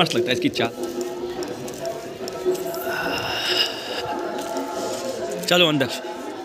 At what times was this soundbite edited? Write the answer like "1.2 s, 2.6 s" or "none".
none